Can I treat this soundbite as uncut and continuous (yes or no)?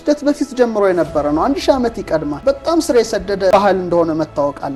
no